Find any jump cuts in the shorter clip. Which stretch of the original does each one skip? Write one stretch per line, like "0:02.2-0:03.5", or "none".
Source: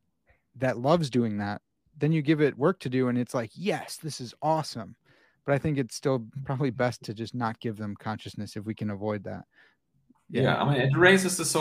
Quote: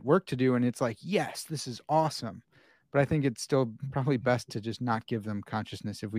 none